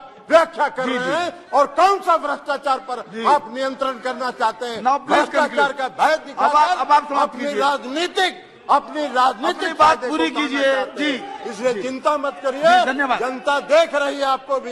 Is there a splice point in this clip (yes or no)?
no